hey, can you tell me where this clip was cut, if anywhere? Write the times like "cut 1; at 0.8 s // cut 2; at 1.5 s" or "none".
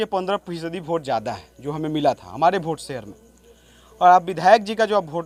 none